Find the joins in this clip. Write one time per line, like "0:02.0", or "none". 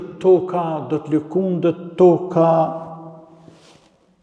none